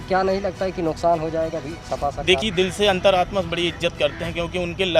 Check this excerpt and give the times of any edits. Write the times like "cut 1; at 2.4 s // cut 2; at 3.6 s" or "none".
cut 1; at 2.4 s